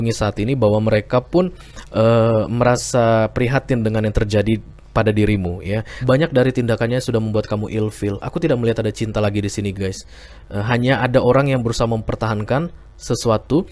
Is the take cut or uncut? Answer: cut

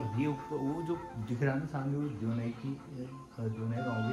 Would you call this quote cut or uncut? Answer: uncut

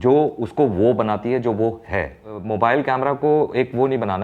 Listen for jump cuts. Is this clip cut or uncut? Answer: cut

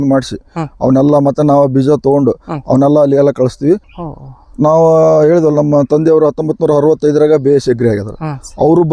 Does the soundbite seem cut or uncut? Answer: cut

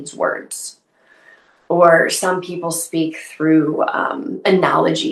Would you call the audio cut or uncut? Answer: uncut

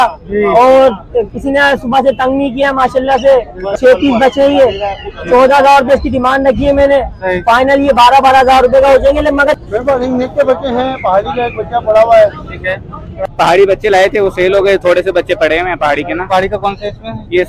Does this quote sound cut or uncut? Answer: cut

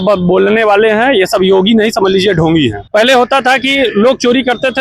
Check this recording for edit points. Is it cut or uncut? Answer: cut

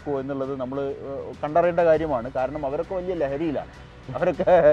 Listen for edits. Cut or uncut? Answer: uncut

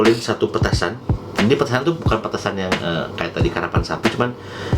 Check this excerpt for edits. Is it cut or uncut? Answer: uncut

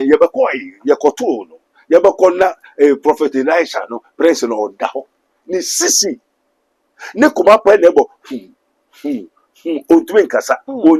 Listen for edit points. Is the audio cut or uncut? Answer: uncut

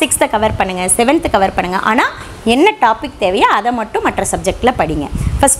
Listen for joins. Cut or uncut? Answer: uncut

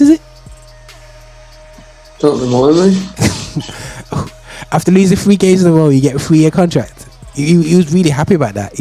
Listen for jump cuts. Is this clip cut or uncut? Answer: uncut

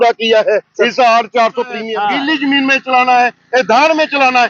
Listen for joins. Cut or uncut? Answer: cut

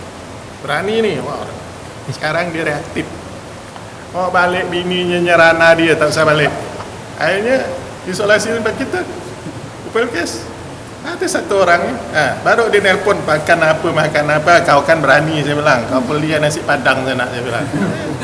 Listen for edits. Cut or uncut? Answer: uncut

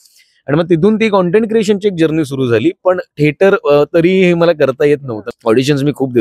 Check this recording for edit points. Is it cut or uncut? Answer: cut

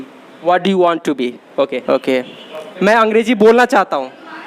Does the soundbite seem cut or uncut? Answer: cut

